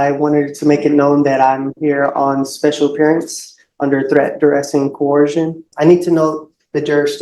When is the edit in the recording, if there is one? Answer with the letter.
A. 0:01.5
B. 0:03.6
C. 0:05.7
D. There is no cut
C